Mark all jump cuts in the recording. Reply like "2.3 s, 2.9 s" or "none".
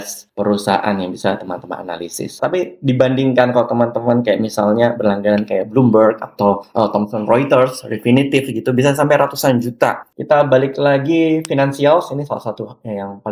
2.3 s, 10.1 s